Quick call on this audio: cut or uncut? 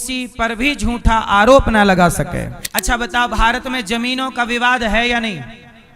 cut